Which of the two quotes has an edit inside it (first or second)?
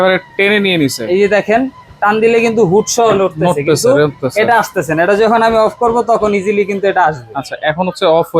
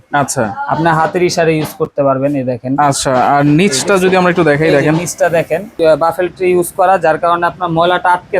second